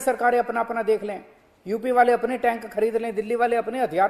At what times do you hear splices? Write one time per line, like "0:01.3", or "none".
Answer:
none